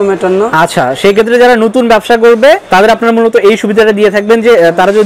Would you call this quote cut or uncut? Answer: uncut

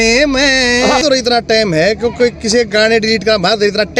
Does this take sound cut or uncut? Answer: cut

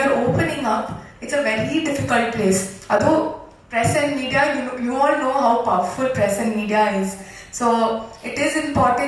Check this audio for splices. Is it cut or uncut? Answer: uncut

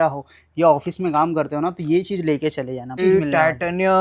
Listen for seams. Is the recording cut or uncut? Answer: cut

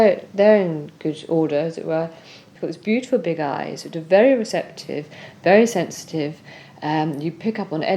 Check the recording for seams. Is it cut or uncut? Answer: cut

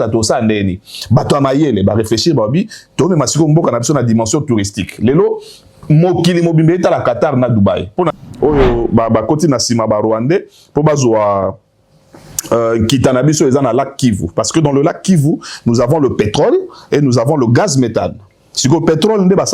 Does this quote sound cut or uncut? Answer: cut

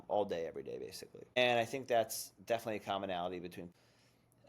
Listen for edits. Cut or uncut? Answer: cut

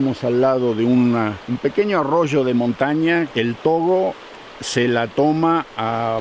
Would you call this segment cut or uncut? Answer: cut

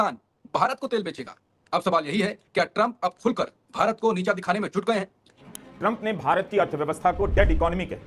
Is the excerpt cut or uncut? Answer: cut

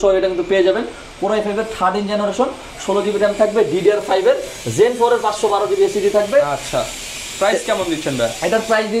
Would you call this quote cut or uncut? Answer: uncut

